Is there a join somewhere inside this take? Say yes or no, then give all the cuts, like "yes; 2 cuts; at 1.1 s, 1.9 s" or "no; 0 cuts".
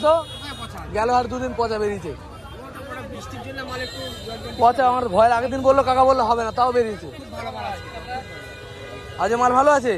no; 0 cuts